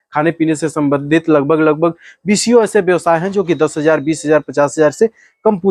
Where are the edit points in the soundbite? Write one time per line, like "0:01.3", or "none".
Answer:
none